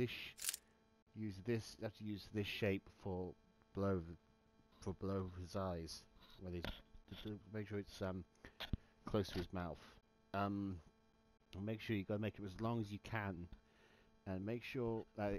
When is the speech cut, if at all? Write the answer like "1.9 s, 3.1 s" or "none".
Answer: 13.1 s